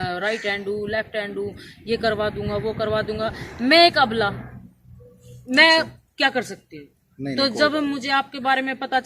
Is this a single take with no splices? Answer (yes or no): yes